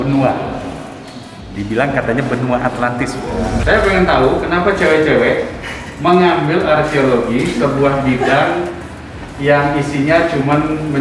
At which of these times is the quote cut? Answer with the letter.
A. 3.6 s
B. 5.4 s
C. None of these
A